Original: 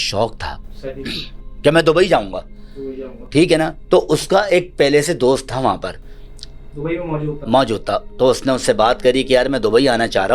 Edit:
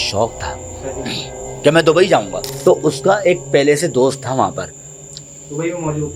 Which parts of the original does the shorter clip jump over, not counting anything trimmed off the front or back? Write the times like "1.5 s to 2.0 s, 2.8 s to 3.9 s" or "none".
2.5 s to 3.8 s